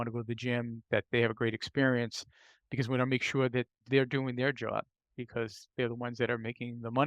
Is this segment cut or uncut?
cut